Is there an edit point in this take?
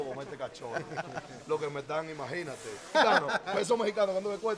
yes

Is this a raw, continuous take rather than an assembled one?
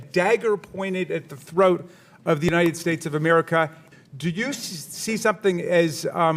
no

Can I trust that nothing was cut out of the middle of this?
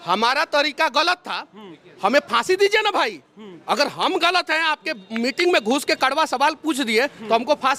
yes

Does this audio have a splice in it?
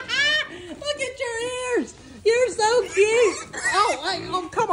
no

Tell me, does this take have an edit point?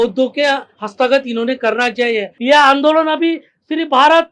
yes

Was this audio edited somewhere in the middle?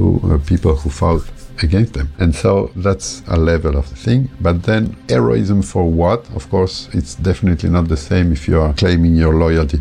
no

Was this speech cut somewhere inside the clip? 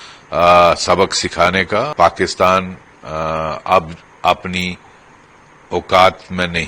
yes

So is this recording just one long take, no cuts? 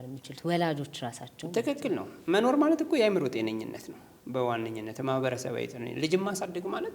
yes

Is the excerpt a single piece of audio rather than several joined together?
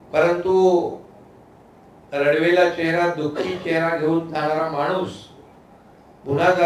yes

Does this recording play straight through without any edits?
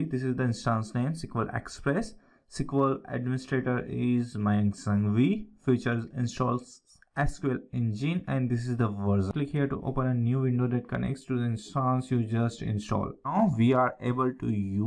no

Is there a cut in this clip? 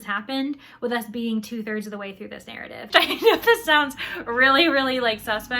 yes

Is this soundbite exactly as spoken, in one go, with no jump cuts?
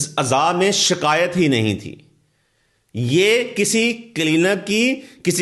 yes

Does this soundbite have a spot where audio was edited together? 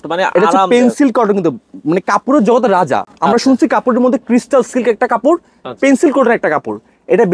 no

